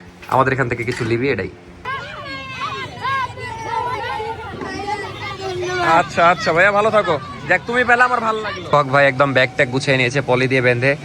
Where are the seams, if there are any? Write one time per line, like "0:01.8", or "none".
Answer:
0:01.7
0:08.7